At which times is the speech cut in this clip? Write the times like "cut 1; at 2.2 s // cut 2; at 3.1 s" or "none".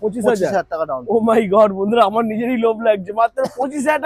none